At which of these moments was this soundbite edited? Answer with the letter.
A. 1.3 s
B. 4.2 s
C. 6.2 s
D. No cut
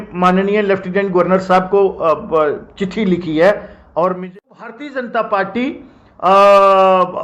B